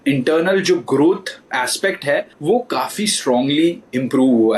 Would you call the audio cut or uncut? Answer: cut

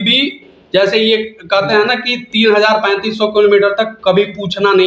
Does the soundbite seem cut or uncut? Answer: uncut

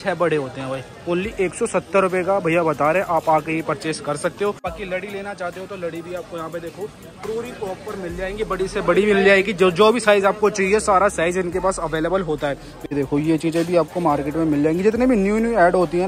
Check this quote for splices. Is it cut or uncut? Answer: cut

